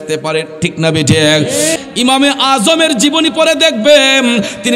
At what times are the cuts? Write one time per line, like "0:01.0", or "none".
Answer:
0:01.8